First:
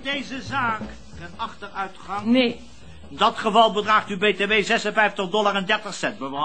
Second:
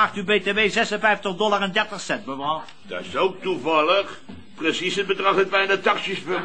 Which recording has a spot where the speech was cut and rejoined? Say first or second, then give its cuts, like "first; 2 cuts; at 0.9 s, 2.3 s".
first; 1 cut; at 1.2 s